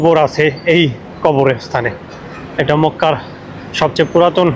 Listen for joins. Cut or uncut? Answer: uncut